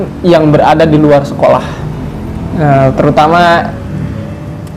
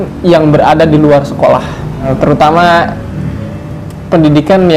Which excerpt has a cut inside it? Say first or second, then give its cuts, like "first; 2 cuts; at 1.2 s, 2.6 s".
second; 1 cut; at 2.1 s